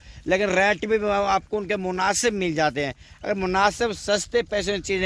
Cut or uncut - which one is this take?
uncut